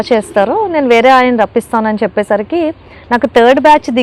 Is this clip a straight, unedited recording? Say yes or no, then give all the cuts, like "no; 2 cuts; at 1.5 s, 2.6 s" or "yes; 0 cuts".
yes; 0 cuts